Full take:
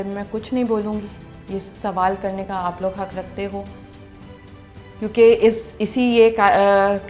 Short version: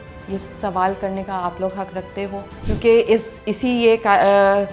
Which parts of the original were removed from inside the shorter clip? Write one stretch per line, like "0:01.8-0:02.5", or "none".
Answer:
0:03.7-0:04.9